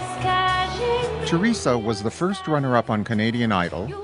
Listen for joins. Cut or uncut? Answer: cut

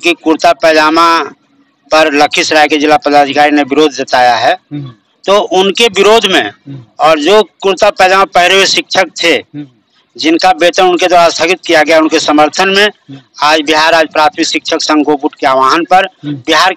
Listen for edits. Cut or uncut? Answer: uncut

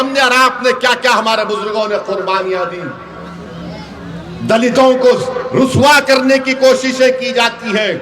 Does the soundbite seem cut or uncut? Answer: uncut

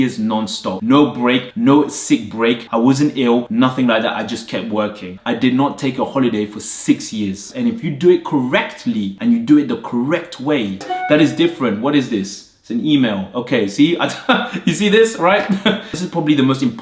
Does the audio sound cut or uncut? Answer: cut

